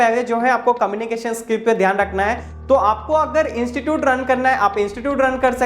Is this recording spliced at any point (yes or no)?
yes